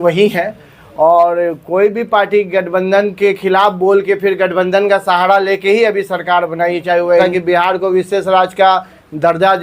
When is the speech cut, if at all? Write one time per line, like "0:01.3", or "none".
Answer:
0:07.2